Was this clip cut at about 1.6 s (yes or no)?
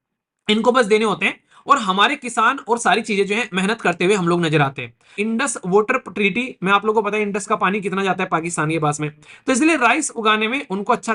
no